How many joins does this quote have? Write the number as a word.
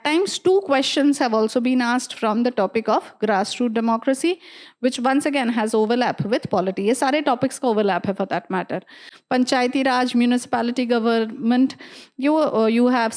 zero